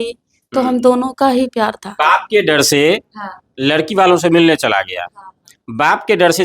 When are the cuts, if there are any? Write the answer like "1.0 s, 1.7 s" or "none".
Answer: 2.0 s